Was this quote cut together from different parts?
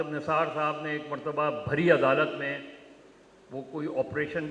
no; 0 cuts

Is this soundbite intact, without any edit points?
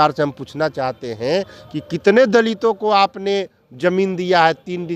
yes; 0 cuts

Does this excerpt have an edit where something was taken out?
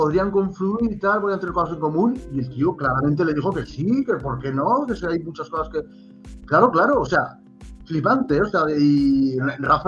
no; 0 cuts

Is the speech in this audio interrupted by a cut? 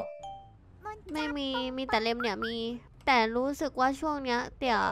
yes; 1 cut; at 2.9 s

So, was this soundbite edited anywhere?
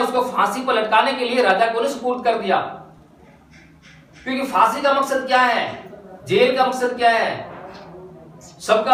no; 0 cuts

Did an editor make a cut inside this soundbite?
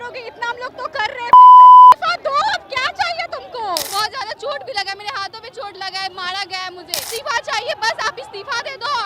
yes; 2 cuts; at 3.9 s, 7.1 s

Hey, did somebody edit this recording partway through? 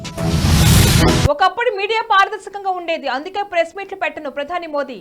no; 0 cuts

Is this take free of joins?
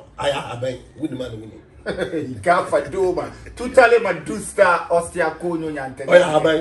yes; 0 cuts

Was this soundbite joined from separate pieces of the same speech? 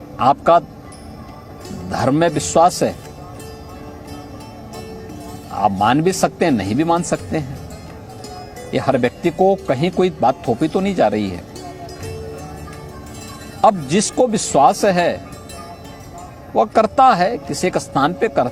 no; 0 cuts

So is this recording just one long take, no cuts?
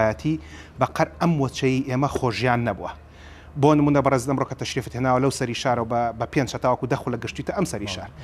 yes; 0 cuts

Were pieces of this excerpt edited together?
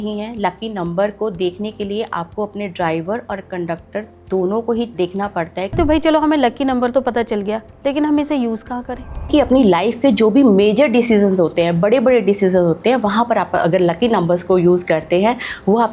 yes; 2 cuts; at 5.8 s, 9.3 s

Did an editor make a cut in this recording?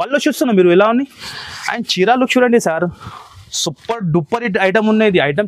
no; 0 cuts

